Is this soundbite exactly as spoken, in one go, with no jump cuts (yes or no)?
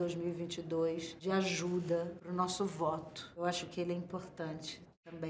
no